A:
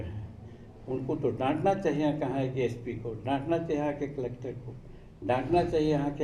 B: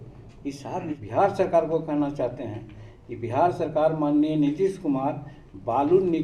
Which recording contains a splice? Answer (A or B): B